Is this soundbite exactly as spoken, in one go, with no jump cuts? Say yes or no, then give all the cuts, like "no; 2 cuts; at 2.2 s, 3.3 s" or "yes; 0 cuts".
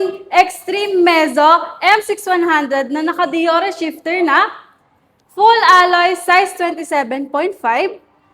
yes; 0 cuts